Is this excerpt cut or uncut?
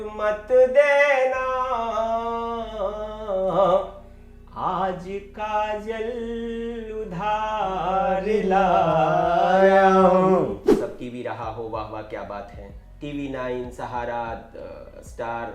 cut